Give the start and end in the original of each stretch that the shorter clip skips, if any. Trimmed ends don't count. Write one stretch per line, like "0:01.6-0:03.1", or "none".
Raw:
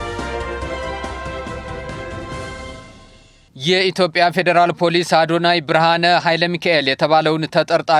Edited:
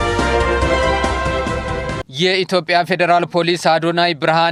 0:02.0-0:03.4